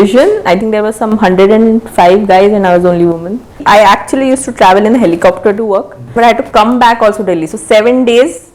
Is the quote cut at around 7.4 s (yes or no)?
no